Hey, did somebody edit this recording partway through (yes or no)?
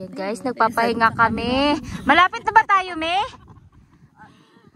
no